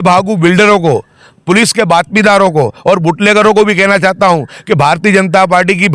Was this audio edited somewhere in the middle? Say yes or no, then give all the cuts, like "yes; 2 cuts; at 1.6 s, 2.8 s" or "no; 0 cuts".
no; 0 cuts